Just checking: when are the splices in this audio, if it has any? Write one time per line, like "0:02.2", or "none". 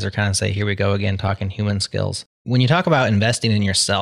0:02.3